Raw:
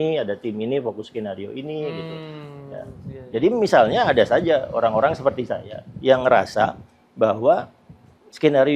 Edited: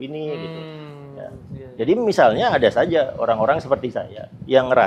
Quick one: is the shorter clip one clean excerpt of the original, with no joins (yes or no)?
yes